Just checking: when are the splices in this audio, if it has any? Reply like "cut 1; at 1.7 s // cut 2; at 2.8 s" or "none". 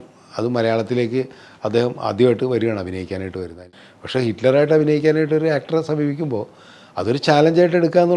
cut 1; at 3.6 s